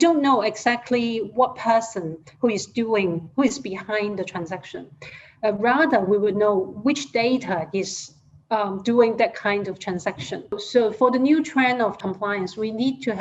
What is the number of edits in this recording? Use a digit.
2